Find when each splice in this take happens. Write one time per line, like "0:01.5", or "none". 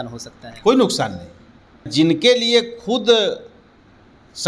0:01.9